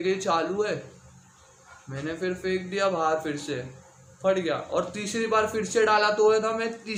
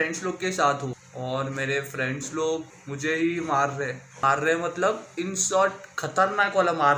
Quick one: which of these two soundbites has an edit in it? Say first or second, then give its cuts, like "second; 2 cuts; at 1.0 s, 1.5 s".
second; 3 cuts; at 1.1 s, 2.8 s, 4.1 s